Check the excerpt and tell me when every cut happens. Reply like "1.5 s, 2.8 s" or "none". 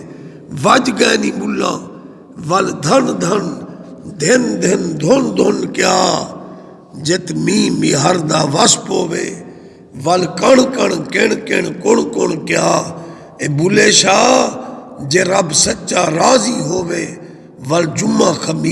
none